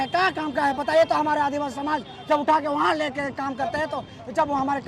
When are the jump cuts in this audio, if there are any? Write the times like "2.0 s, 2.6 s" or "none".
none